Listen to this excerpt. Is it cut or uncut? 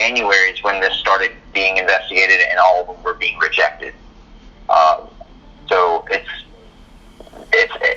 uncut